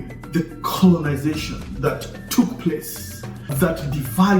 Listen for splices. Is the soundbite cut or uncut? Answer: cut